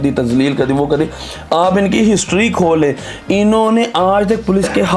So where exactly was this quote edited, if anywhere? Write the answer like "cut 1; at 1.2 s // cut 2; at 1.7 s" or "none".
none